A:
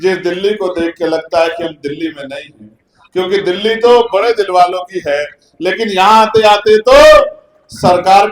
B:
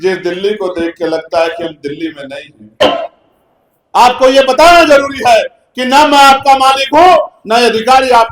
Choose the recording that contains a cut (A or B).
B